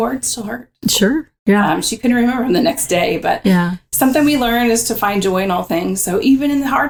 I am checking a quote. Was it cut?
no; 0 cuts

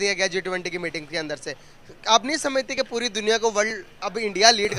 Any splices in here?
no; 0 cuts

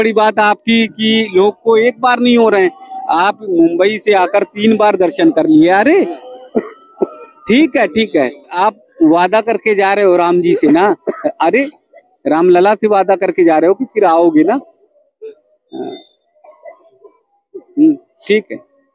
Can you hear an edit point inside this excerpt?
yes; 1 cut; at 8.5 s

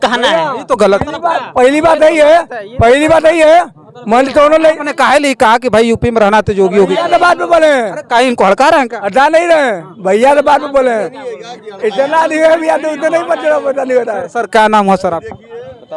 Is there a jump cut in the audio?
no; 0 cuts

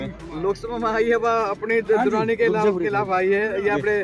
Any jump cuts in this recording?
no; 0 cuts

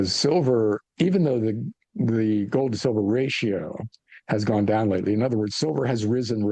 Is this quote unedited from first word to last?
yes; 0 cuts

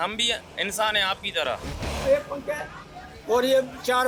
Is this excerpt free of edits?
no; 1 cut; at 2.0 s

